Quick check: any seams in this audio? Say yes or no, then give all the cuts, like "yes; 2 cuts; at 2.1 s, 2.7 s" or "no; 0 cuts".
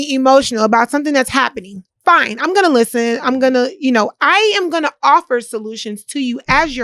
no; 0 cuts